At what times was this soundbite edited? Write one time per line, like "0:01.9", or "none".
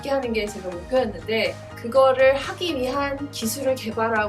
0:01.7